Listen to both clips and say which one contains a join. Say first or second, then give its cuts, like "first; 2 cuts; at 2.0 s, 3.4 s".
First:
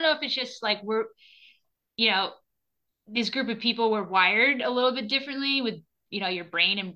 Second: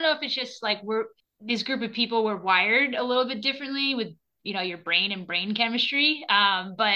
second; 1 cut; at 1.3 s